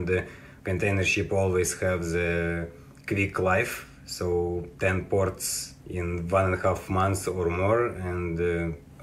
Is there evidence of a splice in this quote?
no; 0 cuts

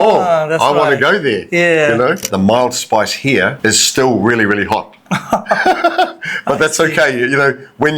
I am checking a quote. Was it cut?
yes; 2 cuts; at 2.3 s, 3.6 s

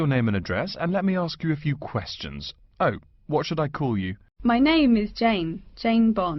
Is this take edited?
yes; 1 cut; at 4.2 s

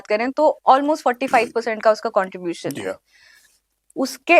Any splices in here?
no; 0 cuts

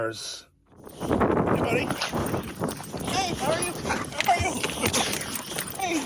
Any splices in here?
yes; 1 cut; at 0.9 s

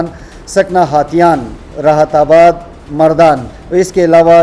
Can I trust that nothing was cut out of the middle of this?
no; 1 cut; at 3.5 s

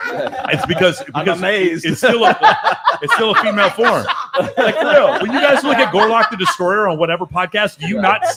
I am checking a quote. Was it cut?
no; 0 cuts

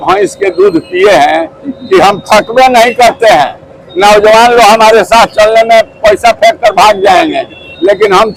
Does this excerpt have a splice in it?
no; 0 cuts

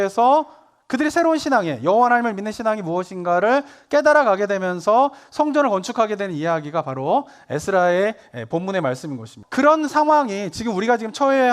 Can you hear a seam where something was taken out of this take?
yes; 1 cut; at 9.4 s

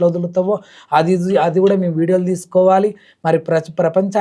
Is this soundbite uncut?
yes; 0 cuts

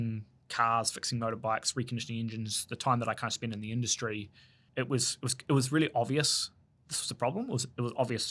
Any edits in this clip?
yes; 1 cut; at 4.6 s

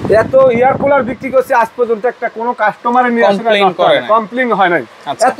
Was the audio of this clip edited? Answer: no; 0 cuts

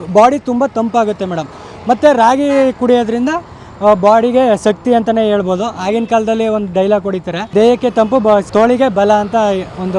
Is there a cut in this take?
no; 0 cuts

